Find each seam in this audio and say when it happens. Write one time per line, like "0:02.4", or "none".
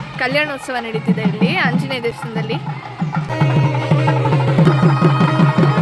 0:03.3
0:04.6